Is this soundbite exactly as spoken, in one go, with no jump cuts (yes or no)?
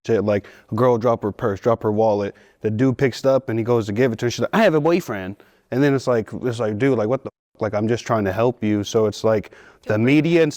yes